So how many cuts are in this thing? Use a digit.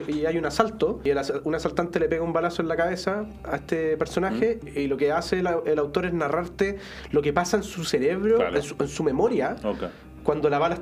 2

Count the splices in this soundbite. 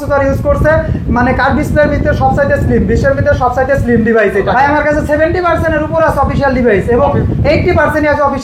1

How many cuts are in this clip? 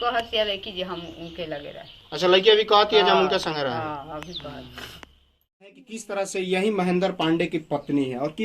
1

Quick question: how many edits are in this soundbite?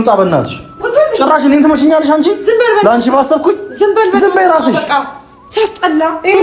0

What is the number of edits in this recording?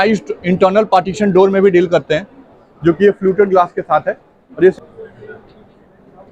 1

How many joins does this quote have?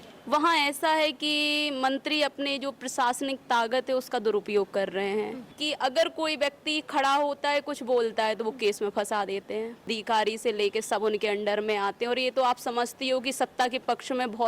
2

